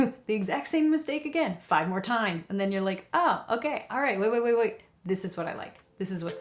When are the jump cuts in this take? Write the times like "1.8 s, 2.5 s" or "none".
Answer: none

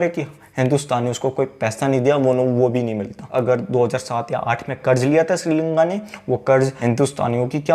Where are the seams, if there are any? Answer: 3.2 s, 6.8 s

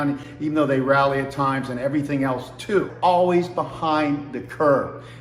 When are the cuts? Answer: 2.9 s

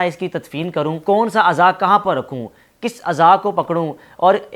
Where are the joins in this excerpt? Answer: 1.0 s

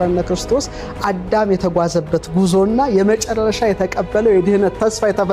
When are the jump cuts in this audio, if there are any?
none

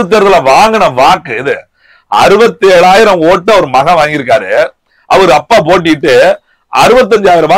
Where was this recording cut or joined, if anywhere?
none

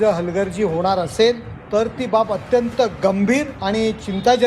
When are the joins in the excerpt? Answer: 1.5 s, 3.6 s

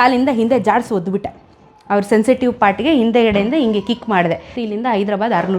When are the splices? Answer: 4.5 s

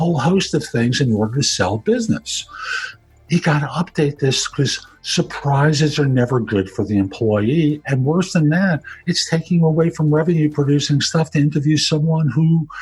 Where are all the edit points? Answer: none

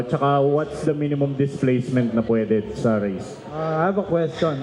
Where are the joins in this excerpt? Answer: 3.5 s

